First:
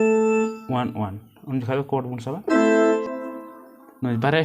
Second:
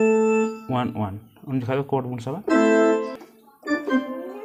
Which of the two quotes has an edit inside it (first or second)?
first